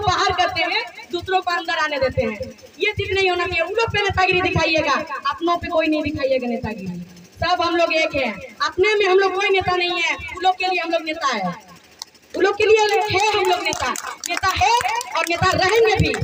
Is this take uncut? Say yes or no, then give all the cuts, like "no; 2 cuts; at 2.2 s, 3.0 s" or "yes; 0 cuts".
yes; 0 cuts